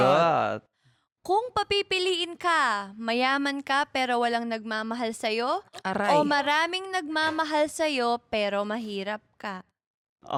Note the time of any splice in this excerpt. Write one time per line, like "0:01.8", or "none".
none